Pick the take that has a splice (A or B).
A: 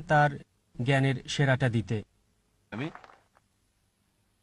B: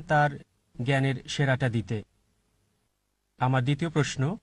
B